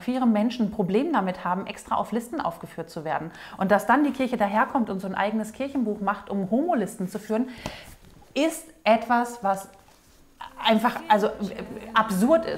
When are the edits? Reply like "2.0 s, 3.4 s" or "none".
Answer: none